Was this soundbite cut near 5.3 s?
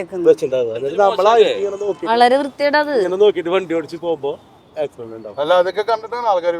no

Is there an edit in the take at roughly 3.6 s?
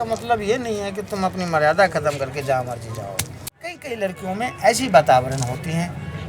yes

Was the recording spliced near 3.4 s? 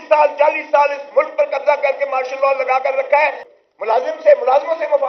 yes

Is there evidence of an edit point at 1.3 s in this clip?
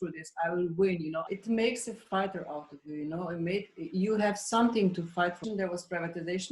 yes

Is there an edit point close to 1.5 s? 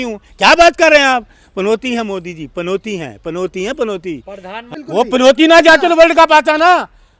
no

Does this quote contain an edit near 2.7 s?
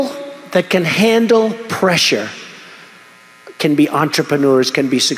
no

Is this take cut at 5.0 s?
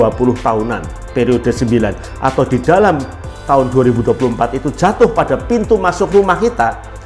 no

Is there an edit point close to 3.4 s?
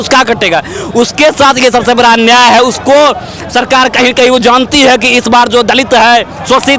no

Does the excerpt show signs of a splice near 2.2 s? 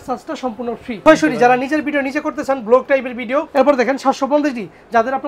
no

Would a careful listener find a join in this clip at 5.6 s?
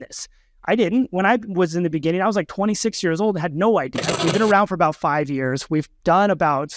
no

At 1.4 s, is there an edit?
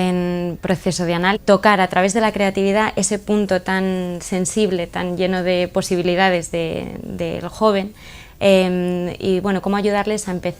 no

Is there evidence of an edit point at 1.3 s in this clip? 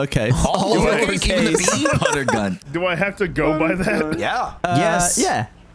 no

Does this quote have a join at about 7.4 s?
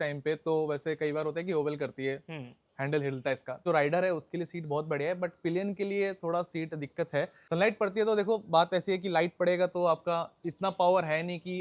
yes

